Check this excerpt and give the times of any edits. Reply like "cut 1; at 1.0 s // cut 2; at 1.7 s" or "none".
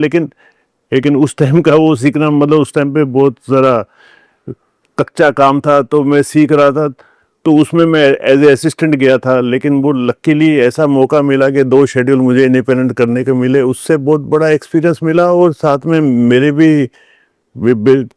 none